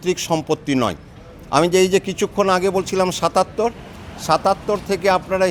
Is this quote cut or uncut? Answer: uncut